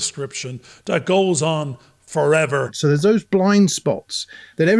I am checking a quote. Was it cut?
yes; 1 cut; at 2.7 s

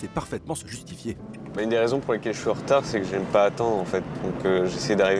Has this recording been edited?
no; 0 cuts

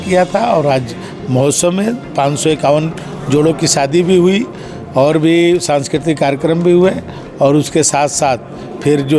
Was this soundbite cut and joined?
no; 0 cuts

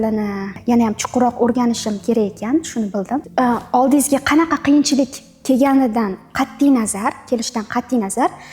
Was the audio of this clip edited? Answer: yes; 1 cut; at 3.3 s

